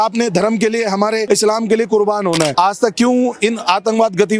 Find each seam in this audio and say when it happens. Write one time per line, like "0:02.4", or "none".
0:01.2
0:02.5